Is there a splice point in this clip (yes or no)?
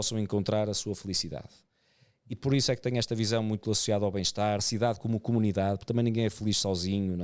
yes